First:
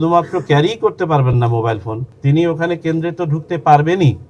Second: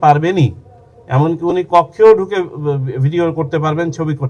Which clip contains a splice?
first; 1 cut; at 1.9 s

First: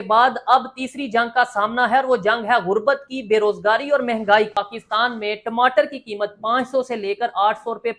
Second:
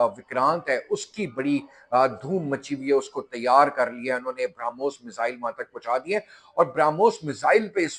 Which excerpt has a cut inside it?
first; 1 cut; at 4.6 s

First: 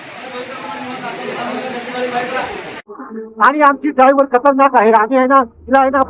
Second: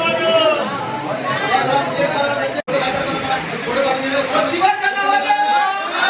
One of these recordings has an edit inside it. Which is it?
first; 1 cut; at 2.7 s

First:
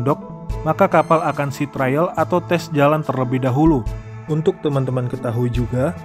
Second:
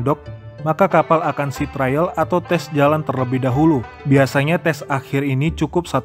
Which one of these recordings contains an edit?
first; 1 cut; at 3.9 s

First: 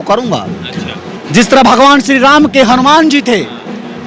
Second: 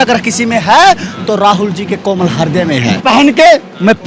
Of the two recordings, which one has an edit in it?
second; 1 cut; at 3.0 s

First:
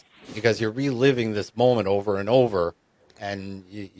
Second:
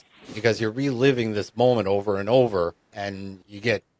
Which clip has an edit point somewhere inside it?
second; 1 cut; at 3.0 s

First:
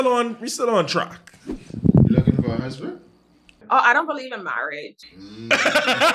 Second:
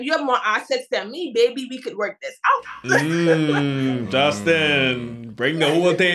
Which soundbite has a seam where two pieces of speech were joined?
first; 2 cuts; at 1.6 s, 3.6 s

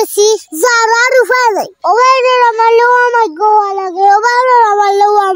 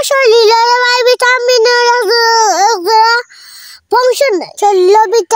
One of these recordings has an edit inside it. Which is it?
first; 1 cut; at 1.8 s

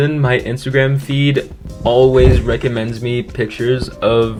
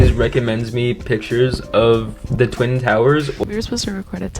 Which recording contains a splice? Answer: second; 1 cut; at 3.4 s

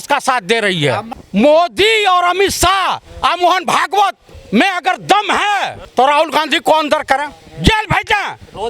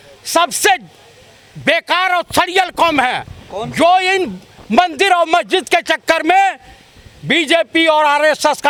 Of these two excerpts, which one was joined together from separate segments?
first; 3 cuts; at 1.1 s, 4.3 s, 5.8 s

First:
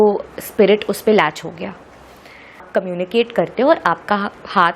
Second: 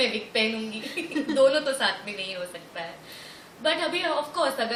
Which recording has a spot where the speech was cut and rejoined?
first; 1 cut; at 2.6 s

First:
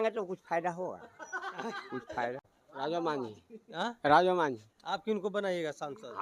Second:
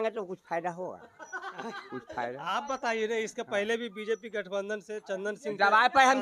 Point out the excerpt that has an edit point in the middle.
first; 1 cut; at 2.4 s

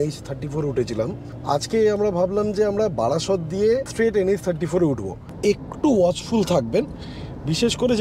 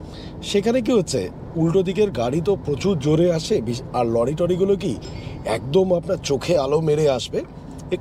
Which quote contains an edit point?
first; 3 cuts; at 1.3 s, 3.9 s, 5.3 s

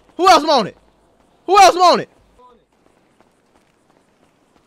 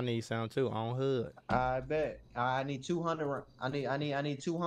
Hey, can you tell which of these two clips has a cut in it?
first; 1 cut; at 2.4 s

